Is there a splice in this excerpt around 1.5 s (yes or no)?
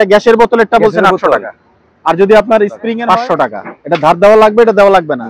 no